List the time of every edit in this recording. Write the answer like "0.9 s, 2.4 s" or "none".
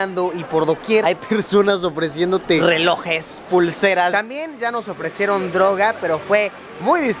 1.0 s, 2.6 s, 4.1 s